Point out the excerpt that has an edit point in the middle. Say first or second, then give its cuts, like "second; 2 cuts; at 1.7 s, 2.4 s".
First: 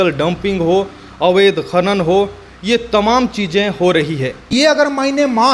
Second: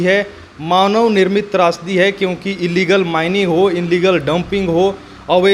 first; 1 cut; at 4.5 s